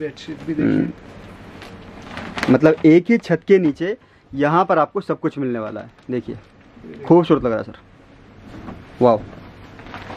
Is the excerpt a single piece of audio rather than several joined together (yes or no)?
yes